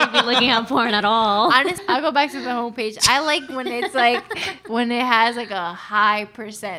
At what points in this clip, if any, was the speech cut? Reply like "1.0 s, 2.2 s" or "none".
1.8 s